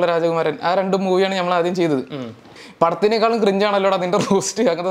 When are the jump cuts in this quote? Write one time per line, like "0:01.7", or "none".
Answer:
0:02.6

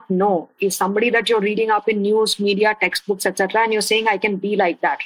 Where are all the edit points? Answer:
none

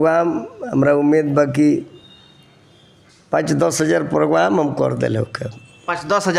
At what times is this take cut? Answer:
none

